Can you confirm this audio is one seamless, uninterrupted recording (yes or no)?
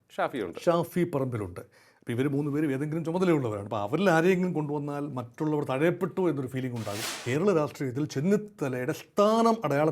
no